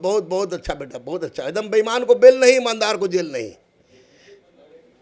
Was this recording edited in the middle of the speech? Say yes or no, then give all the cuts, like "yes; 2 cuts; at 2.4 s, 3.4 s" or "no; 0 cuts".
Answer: no; 0 cuts